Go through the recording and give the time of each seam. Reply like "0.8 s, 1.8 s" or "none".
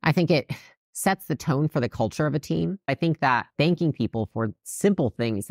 2.9 s